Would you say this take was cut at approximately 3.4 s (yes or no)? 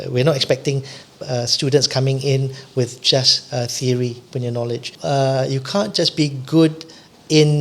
no